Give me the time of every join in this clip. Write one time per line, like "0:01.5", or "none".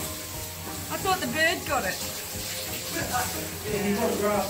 none